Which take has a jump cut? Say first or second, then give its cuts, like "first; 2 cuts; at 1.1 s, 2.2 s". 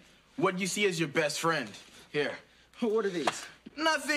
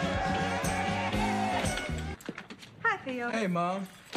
first; 1 cut; at 3.2 s